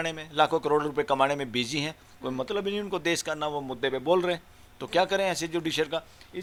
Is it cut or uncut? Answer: uncut